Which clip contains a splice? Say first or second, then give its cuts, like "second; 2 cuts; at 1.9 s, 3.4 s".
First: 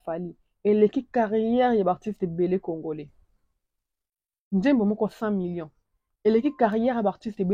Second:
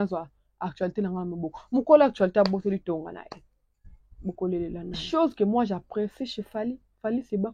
second; 1 cut; at 5.0 s